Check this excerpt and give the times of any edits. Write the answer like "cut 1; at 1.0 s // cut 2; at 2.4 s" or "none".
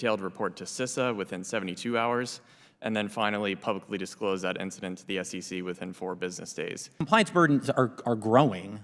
cut 1; at 7.0 s